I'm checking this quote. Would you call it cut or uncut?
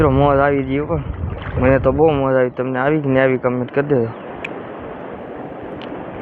uncut